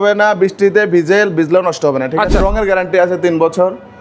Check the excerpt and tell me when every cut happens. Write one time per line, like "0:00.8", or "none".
0:02.4